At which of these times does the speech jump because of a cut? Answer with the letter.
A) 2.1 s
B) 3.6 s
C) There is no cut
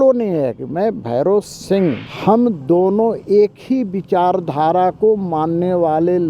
A